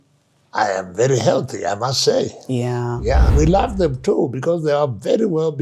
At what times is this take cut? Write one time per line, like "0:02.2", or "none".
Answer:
0:03.3